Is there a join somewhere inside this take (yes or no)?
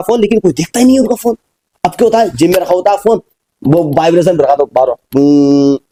no